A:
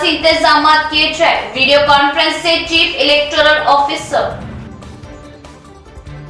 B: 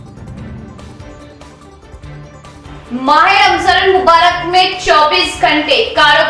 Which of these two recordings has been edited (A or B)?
B